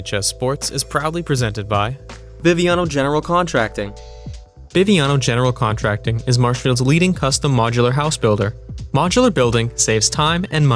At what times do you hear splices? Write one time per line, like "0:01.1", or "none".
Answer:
0:02.1